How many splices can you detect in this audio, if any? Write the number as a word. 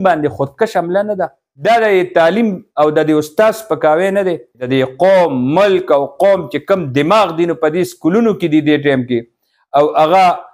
two